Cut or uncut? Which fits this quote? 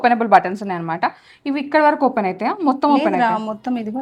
uncut